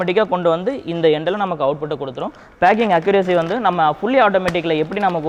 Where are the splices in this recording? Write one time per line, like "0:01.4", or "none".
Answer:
none

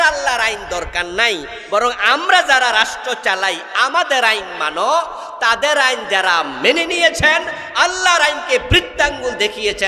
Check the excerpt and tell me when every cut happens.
none

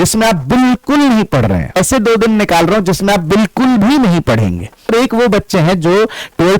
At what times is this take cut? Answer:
0:01.8
0:04.9

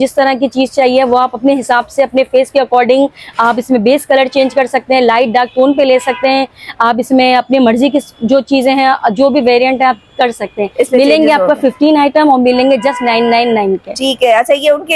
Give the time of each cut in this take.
none

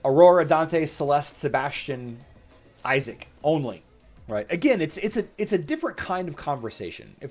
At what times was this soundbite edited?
0:04.0

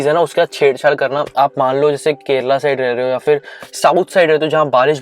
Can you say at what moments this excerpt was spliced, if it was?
0:01.3

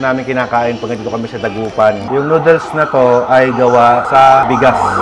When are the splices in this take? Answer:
none

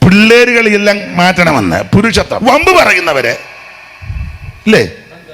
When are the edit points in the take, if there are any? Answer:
0:02.3

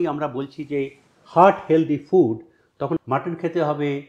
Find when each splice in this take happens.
0:03.0

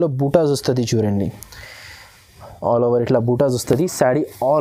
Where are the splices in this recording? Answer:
none

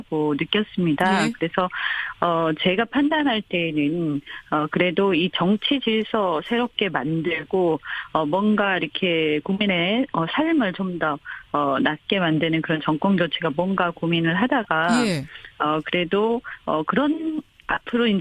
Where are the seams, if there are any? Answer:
0:11.3

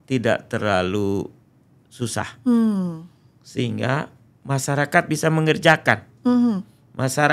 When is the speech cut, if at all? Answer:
none

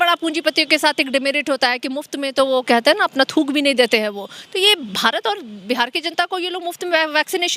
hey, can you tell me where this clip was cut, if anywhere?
none

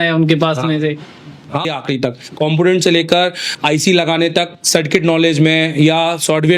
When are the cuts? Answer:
0:01.7

